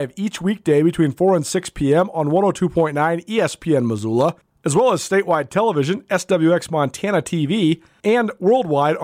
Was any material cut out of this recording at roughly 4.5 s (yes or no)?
yes